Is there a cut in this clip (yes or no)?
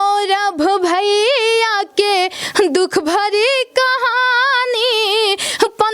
no